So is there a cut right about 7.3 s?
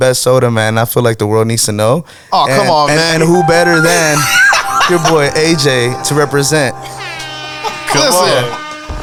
no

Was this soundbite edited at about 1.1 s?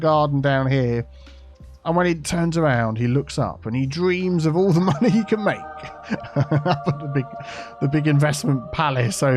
no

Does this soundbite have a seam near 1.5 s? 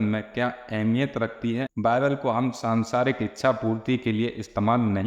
no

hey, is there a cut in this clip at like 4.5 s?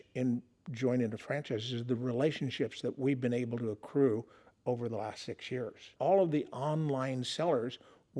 no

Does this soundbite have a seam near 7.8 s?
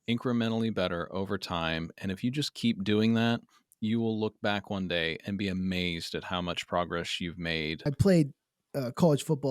yes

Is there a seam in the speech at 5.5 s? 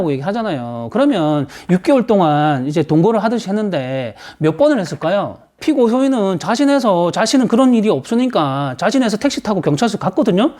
yes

